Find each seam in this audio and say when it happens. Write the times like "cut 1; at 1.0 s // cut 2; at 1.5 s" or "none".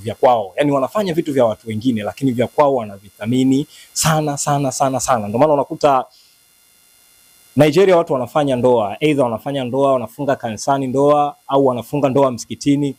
none